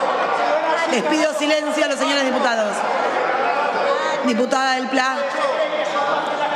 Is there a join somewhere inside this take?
no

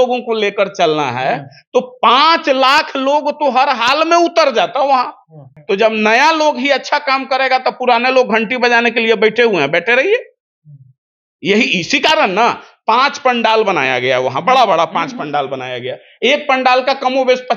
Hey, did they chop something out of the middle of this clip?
yes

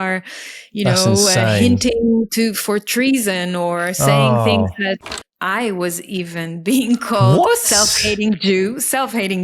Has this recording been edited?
yes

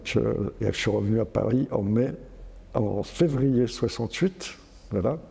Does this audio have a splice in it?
no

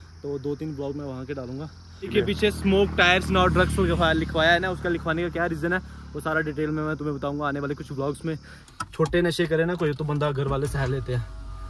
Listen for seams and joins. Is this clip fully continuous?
no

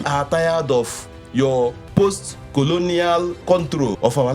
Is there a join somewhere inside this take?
yes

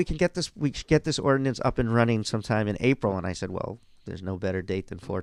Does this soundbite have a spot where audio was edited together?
no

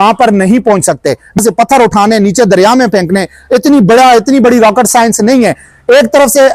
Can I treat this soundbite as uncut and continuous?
no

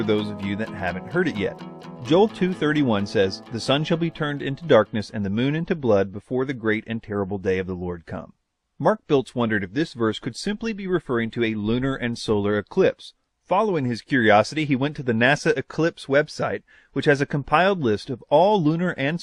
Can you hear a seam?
no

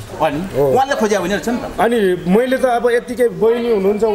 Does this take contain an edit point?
no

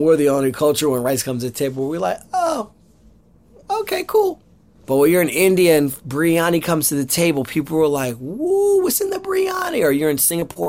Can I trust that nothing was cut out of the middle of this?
no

